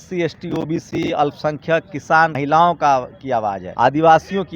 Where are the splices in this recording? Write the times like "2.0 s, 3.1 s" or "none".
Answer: 2.3 s, 3.6 s